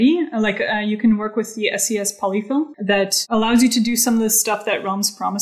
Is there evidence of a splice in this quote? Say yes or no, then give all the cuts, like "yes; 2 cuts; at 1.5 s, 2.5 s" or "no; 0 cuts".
yes; 1 cut; at 2.7 s